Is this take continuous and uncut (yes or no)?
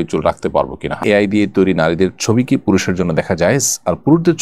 no